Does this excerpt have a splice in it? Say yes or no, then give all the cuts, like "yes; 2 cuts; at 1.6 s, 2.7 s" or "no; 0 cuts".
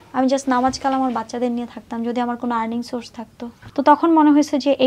yes; 1 cut; at 3.6 s